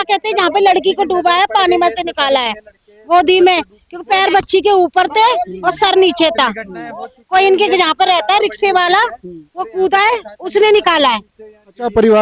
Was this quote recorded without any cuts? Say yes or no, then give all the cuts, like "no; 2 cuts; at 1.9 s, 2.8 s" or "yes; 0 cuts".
yes; 0 cuts